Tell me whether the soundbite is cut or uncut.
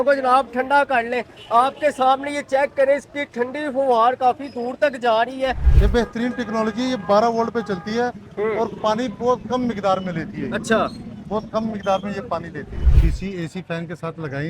cut